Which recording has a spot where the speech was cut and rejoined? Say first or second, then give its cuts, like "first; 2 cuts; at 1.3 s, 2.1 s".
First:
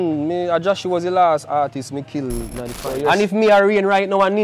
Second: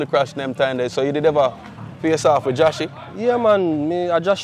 first; 1 cut; at 2.8 s